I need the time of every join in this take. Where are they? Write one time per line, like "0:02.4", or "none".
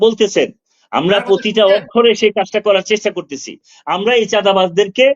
0:03.6